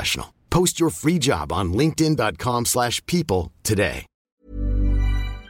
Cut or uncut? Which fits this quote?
cut